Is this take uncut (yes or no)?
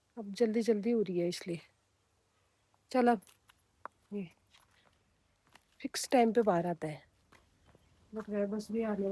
yes